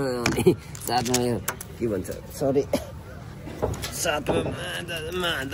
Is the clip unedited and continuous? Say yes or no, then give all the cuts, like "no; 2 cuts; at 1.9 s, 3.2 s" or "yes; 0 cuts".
yes; 0 cuts